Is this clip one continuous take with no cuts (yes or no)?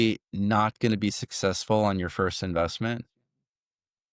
yes